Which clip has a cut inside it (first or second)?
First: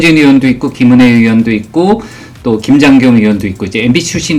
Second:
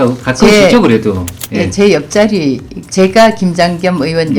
second